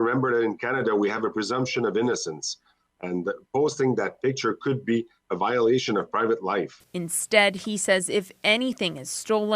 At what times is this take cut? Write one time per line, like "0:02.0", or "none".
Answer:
0:07.6